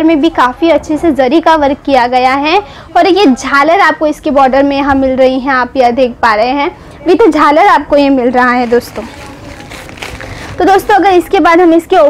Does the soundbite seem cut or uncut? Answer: uncut